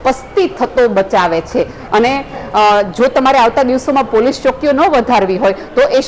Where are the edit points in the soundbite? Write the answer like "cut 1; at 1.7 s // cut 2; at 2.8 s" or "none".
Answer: cut 1; at 1.8 s